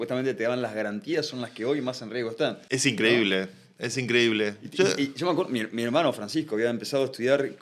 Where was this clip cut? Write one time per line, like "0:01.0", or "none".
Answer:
none

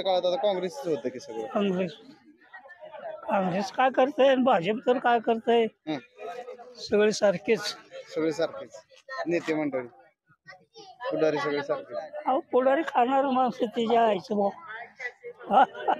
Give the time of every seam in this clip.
none

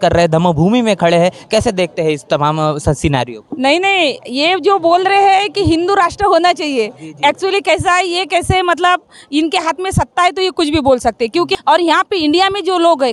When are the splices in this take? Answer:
0:11.5

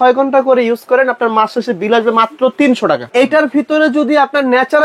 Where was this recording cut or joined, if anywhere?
0:03.1

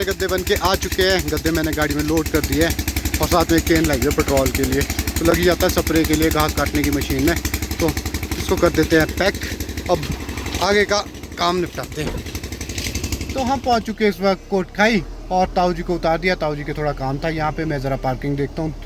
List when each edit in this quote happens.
none

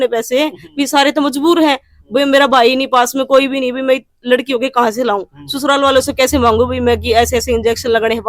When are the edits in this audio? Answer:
none

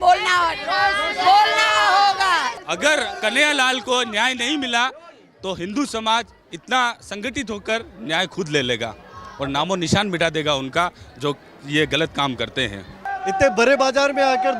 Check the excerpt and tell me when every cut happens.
0:02.6
0:13.0

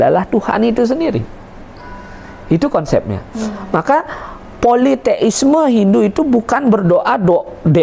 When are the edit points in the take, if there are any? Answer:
none

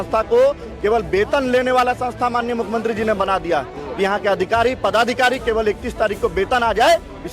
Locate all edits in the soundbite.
none

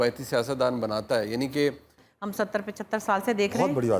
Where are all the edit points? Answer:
0:02.0

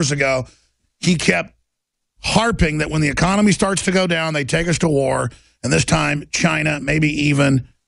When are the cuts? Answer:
none

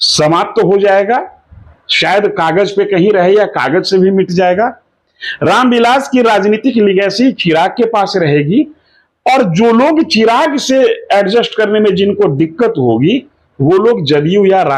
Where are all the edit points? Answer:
none

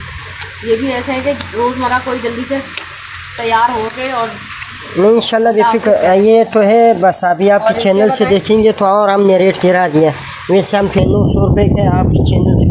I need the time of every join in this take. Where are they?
0:11.0

